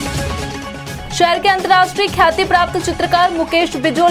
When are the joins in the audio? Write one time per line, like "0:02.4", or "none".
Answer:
0:01.0